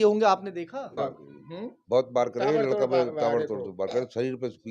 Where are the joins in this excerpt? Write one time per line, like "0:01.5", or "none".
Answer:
0:01.0